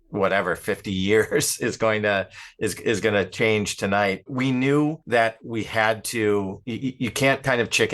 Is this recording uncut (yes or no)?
no